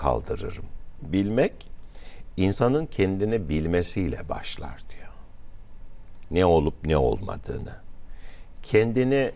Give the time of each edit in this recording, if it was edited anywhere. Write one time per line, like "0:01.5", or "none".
0:01.0